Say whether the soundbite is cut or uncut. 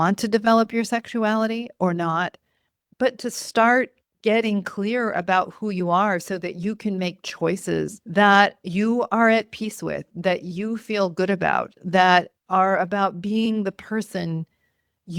cut